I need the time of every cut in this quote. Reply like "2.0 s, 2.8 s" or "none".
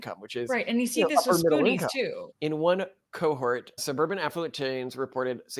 2.2 s